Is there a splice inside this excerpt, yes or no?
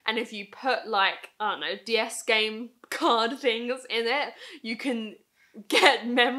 no